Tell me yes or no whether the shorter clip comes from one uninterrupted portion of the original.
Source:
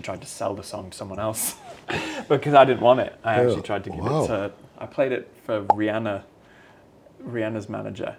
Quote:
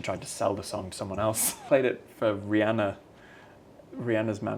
no